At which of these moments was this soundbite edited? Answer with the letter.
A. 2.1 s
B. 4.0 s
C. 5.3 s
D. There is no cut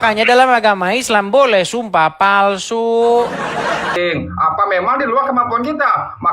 B